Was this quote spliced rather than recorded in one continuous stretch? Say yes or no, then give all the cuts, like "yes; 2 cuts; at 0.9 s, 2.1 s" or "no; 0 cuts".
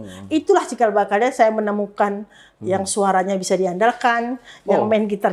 no; 0 cuts